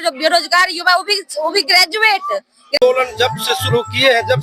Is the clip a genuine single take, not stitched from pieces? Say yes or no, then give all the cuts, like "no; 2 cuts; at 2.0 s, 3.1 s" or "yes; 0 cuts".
no; 1 cut; at 2.8 s